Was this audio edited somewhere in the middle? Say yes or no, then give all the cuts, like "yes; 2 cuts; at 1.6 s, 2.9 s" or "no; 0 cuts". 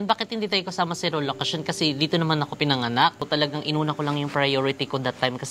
yes; 1 cut; at 3.3 s